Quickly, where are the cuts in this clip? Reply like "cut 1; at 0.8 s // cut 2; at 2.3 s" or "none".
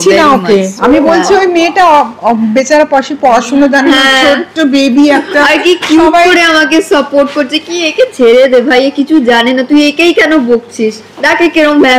none

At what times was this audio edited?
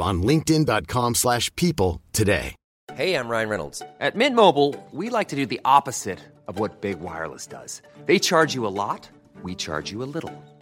cut 1; at 2.6 s

